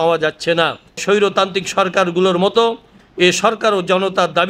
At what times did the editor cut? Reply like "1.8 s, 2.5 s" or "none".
1.0 s